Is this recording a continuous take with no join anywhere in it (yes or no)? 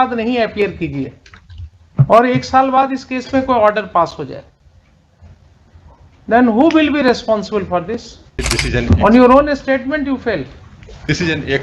no